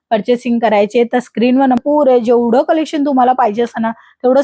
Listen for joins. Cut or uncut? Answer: cut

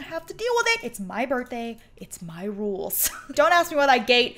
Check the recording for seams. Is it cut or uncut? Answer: cut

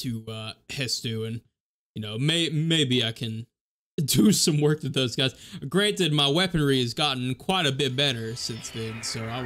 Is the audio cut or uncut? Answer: uncut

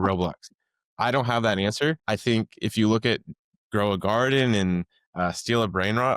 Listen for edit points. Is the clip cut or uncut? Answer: cut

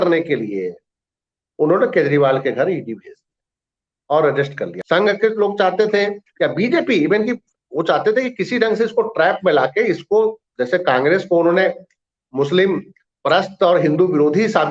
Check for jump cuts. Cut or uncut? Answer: cut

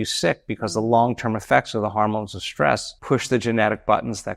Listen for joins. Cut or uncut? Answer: cut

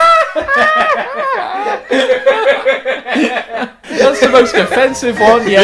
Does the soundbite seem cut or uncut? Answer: cut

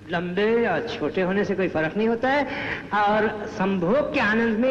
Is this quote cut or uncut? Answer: uncut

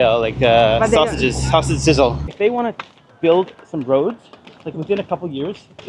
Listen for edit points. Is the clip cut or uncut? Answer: cut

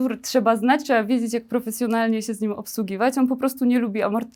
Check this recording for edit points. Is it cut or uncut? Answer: uncut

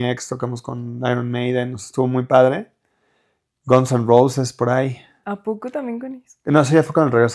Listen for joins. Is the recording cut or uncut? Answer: uncut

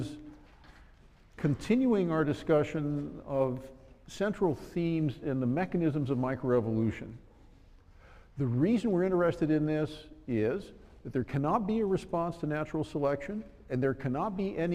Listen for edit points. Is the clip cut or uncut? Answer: uncut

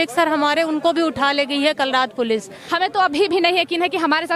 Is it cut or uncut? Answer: cut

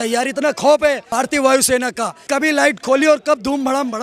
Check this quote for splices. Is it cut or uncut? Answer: cut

